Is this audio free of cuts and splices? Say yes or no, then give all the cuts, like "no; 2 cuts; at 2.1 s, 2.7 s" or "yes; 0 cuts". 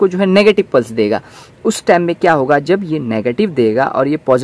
yes; 0 cuts